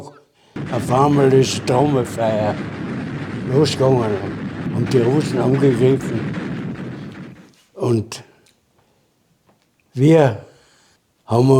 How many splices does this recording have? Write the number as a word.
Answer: one